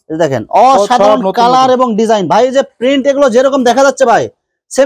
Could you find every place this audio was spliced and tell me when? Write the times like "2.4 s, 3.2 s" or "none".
none

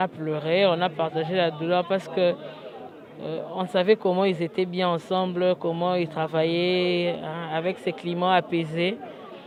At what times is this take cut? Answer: none

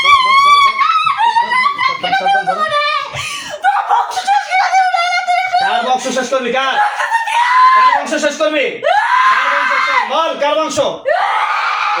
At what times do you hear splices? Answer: none

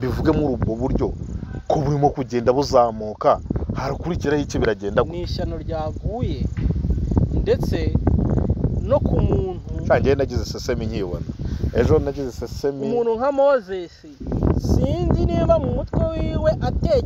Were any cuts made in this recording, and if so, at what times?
none

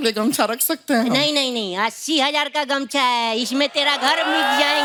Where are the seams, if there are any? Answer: none

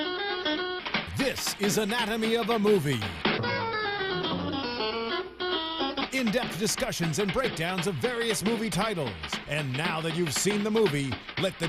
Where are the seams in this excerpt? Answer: none

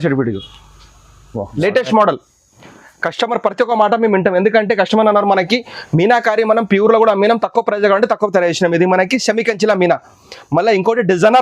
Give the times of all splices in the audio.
1.4 s

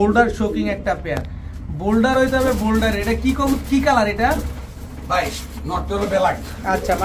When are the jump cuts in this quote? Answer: none

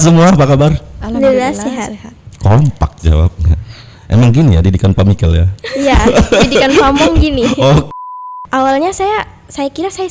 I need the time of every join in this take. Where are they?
7.9 s

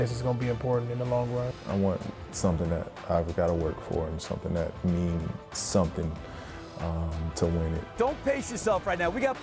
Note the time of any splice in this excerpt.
1.5 s, 7.8 s

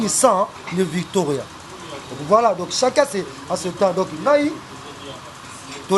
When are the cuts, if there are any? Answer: none

